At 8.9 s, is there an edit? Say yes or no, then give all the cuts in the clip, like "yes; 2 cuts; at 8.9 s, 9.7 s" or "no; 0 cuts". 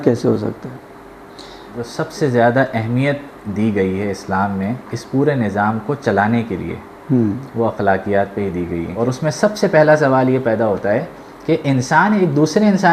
yes; 2 cuts; at 1.9 s, 8.9 s